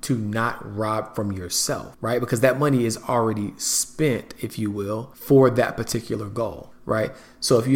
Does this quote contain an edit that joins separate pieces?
yes; 3 cuts; at 1.9 s, 5.1 s, 6.7 s

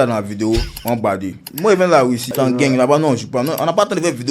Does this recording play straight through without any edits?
no; 2 cuts; at 1.5 s, 2.3 s

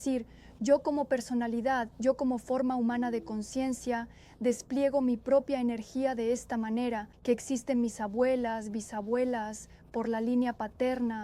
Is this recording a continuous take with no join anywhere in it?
no; 1 cut; at 7.1 s

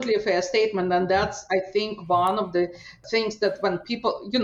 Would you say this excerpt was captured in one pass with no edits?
yes; 0 cuts

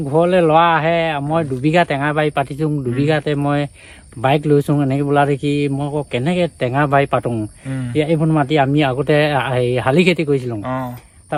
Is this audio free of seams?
yes; 0 cuts

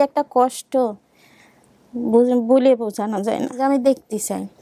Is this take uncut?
no; 1 cut; at 3.6 s

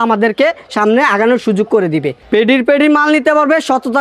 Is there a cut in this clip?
yes; 1 cut; at 2.1 s

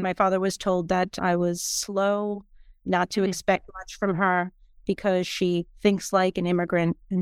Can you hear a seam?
no; 0 cuts

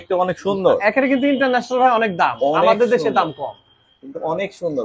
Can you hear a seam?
no; 0 cuts

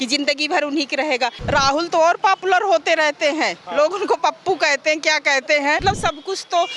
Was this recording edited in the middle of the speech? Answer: yes; 2 cuts; at 1.4 s, 5.8 s

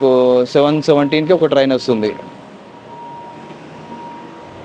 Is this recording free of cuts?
yes; 0 cuts

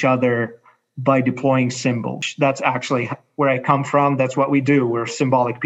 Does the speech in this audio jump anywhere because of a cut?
yes; 1 cut; at 2.2 s

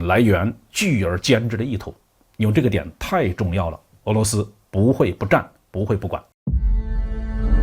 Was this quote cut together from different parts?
yes; 1 cut; at 6.3 s

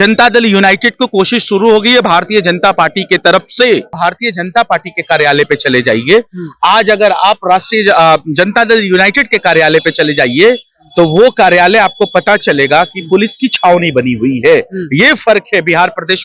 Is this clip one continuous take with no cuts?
no; 1 cut; at 3.9 s

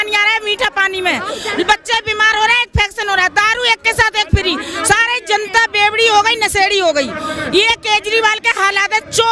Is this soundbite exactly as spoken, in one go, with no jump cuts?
yes; 0 cuts

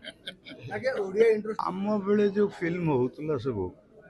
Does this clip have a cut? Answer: yes; 1 cut; at 1.5 s

